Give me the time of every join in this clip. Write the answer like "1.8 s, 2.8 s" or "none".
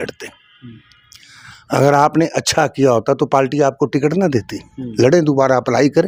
none

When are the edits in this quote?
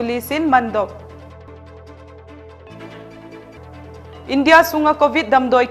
1.5 s, 3.7 s

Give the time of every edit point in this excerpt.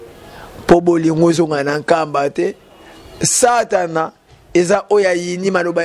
none

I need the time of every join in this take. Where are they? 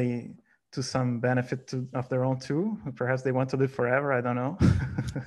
none

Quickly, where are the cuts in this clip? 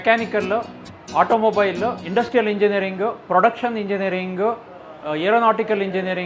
2.0 s

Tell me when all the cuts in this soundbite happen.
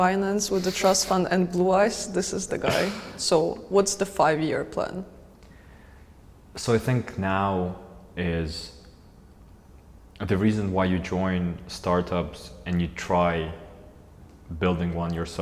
none

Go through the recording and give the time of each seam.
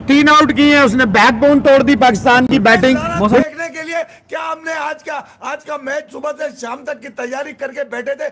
3.4 s

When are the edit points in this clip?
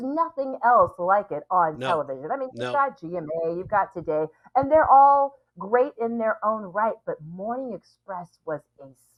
none

